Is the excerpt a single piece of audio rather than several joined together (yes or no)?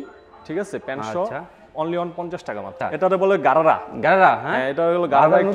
no